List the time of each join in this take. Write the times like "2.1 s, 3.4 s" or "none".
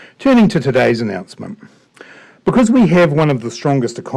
none